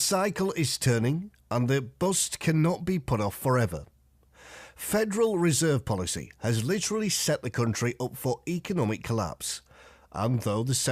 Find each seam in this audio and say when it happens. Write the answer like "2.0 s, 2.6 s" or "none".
4.7 s